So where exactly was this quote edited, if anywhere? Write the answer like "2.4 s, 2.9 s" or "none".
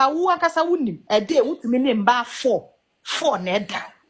1.0 s